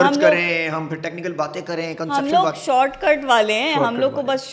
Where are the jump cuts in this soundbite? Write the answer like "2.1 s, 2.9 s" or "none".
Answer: none